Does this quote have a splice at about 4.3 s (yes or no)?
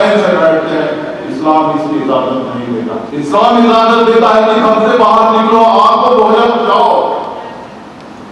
no